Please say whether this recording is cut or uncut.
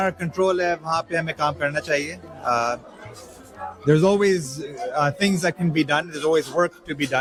uncut